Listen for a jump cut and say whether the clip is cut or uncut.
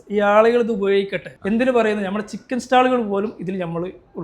cut